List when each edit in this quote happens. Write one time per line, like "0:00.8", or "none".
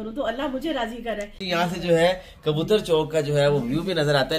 0:01.4